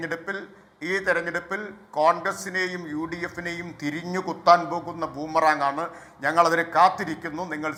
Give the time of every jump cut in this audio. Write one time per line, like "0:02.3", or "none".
none